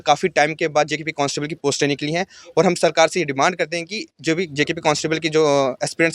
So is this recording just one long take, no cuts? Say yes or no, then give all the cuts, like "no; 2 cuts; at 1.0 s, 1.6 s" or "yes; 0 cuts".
yes; 0 cuts